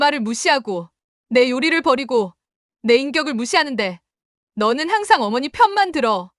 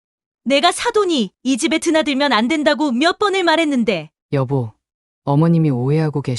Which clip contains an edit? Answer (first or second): second